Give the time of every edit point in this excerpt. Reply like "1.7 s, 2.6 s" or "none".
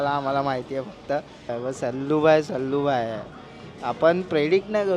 1.3 s